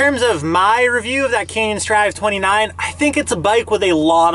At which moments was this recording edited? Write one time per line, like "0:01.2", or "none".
none